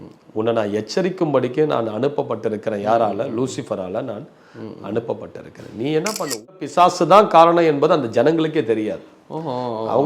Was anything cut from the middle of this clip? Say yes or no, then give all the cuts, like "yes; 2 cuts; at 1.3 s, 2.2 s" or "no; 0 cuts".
yes; 1 cut; at 6.5 s